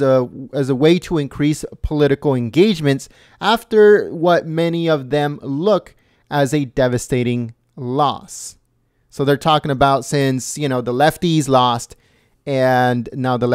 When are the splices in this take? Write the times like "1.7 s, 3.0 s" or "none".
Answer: 4.4 s